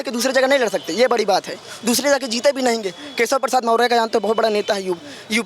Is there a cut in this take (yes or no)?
no